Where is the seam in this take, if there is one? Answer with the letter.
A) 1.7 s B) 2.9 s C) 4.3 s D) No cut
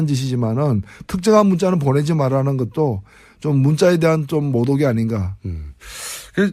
C